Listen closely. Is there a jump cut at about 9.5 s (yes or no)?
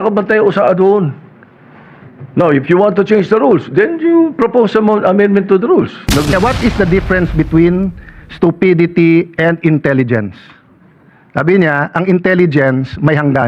no